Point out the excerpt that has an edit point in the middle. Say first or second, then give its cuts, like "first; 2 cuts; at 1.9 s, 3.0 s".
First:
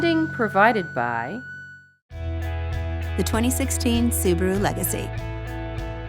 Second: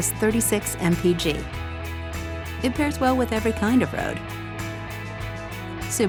first; 1 cut; at 1.4 s